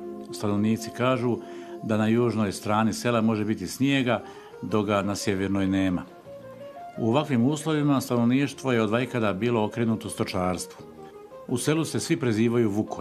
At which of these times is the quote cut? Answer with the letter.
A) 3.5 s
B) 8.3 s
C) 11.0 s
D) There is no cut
B